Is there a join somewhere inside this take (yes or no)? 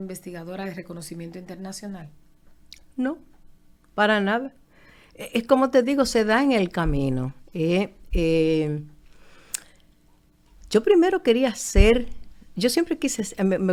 no